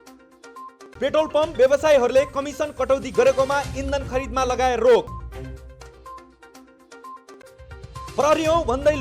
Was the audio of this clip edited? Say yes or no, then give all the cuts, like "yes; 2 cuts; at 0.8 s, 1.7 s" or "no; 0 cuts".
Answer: yes; 1 cut; at 0.9 s